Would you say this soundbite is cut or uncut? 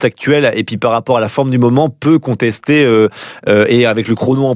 uncut